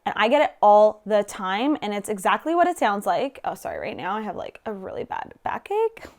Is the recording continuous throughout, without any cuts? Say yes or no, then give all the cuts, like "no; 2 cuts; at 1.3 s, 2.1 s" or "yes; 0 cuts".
yes; 0 cuts